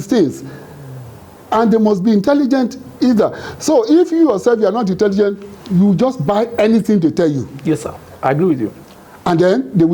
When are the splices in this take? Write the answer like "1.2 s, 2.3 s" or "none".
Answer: none